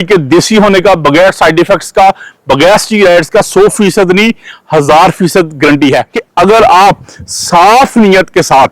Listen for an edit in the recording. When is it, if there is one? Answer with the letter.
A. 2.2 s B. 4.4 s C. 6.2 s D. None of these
C